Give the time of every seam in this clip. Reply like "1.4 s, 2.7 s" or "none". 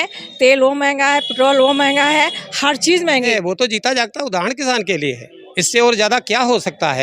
3.3 s